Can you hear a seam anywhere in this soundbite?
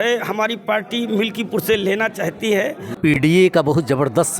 yes; 1 cut; at 3.0 s

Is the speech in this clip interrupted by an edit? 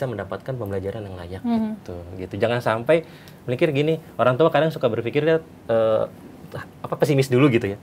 no; 0 cuts

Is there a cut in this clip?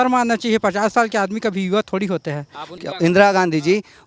yes; 1 cut; at 2.7 s

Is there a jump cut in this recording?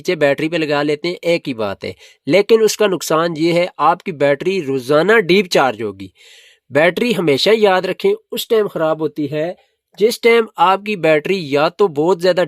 no; 0 cuts

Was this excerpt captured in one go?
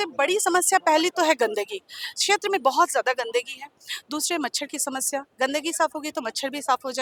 yes; 0 cuts

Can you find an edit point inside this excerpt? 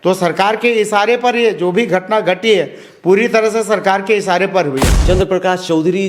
yes; 1 cut; at 4.9 s

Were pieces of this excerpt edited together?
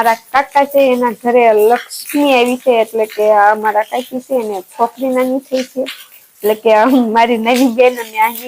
no; 0 cuts

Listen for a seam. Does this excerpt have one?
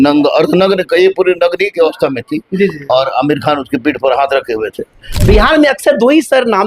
yes; 1 cut; at 5.2 s

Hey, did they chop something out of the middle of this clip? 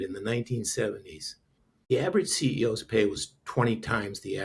yes; 1 cut; at 1.9 s

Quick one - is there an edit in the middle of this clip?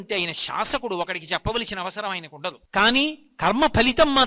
yes; 1 cut; at 2.6 s

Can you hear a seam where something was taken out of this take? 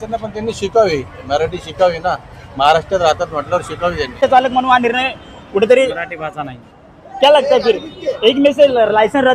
no; 0 cuts

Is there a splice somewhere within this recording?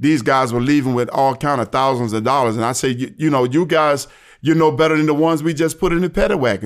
no; 0 cuts

